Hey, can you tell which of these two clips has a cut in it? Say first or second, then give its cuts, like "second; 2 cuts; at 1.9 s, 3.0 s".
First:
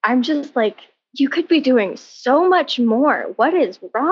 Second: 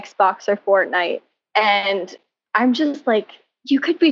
second; 1 cut; at 1.3 s